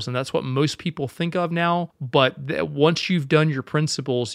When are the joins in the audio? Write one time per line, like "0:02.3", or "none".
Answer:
0:02.0